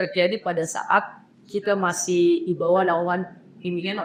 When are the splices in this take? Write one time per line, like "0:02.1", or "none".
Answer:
none